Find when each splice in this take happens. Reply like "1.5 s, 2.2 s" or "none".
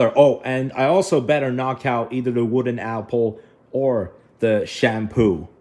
none